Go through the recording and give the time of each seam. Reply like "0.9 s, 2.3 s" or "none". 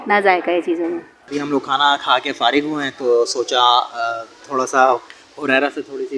1.2 s